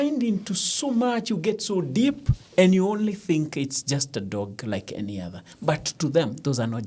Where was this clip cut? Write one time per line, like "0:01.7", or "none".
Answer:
none